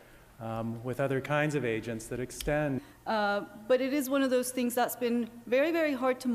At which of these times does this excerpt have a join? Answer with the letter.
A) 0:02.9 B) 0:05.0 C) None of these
C